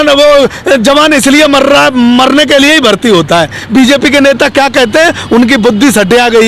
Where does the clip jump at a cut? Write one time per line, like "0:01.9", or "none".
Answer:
none

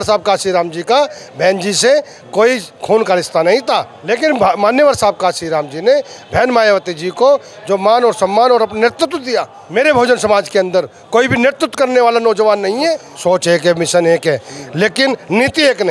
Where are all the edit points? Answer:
0:03.9
0:09.6
0:13.1

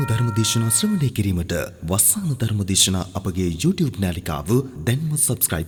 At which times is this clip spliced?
none

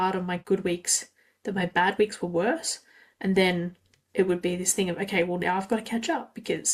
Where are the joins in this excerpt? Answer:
none

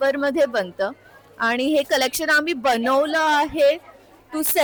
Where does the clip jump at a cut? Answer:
none

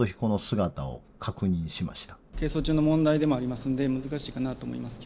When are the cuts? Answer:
0:02.2

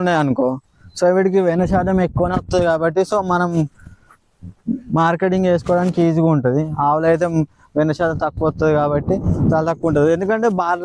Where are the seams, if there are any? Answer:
none

